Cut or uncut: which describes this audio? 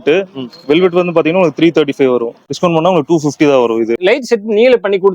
cut